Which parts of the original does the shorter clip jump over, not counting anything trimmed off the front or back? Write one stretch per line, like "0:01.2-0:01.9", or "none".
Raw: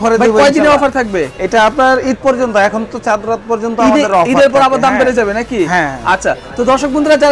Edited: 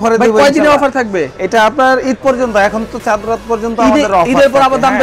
none